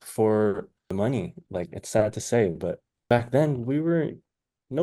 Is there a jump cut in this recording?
yes; 2 cuts; at 0.9 s, 2.9 s

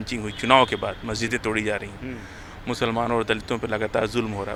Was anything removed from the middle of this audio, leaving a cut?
no; 0 cuts

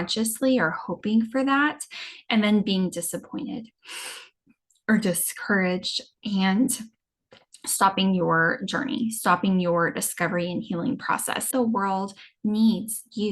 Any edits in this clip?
yes; 1 cut; at 11.5 s

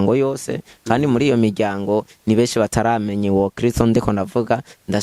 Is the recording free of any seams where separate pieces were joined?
yes; 0 cuts

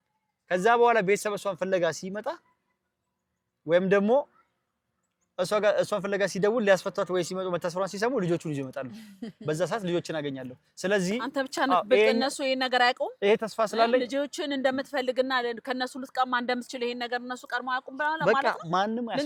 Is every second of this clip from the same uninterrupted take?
yes; 0 cuts

